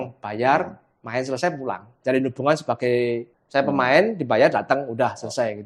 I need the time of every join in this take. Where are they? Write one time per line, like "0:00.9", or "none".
0:01.9
0:03.3